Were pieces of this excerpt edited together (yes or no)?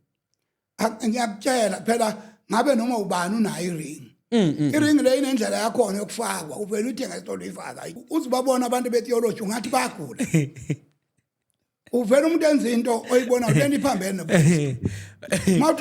yes